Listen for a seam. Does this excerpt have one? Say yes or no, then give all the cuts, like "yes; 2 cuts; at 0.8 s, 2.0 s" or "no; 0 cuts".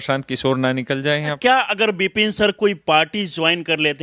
yes; 1 cut; at 1.4 s